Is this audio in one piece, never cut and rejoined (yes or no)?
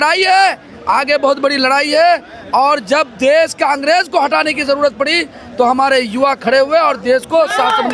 yes